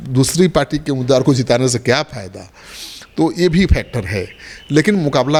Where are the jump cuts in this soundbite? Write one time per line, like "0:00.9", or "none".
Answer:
none